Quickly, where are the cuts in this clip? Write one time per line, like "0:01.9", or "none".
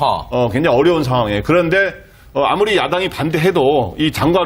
0:03.1